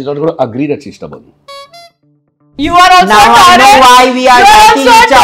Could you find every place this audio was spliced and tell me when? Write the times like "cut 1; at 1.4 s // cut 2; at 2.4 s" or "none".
cut 1; at 2.1 s